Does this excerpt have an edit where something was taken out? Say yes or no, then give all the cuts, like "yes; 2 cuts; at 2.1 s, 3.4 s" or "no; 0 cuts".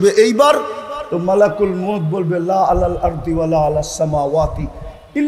no; 0 cuts